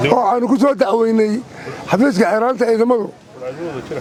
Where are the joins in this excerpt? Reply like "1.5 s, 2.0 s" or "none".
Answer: none